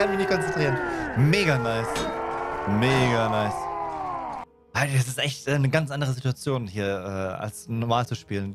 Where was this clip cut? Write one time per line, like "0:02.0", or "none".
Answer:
0:04.5